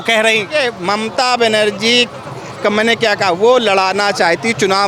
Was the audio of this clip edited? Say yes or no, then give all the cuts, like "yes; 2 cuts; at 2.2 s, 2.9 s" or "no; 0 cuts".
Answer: no; 0 cuts